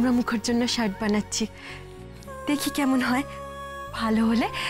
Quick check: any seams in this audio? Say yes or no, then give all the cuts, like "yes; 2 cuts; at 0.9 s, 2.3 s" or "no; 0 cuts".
no; 0 cuts